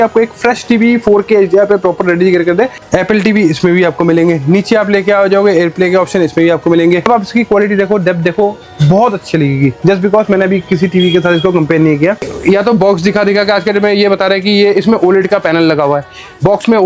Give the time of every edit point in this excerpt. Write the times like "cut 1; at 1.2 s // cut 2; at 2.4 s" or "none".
cut 1; at 2.8 s // cut 2; at 7.0 s // cut 3; at 12.3 s